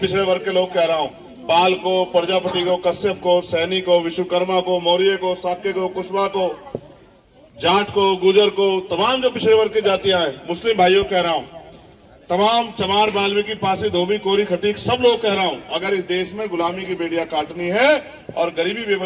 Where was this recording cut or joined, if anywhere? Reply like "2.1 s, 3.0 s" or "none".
none